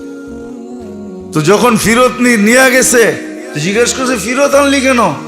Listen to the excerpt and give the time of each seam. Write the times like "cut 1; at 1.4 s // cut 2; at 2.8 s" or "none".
cut 1; at 1.3 s